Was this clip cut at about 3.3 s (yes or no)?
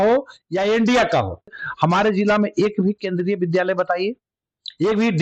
no